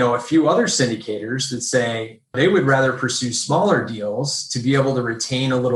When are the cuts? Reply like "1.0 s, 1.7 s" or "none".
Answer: none